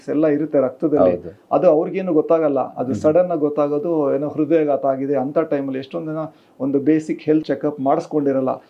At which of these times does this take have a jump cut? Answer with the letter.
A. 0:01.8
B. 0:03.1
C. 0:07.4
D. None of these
C